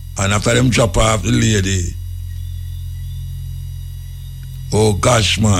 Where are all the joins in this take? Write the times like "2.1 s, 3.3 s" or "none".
none

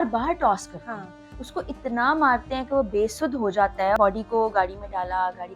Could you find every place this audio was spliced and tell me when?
4.0 s

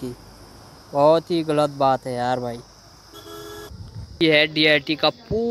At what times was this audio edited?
4.1 s

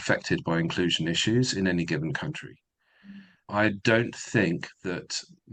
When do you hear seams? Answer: 3.5 s

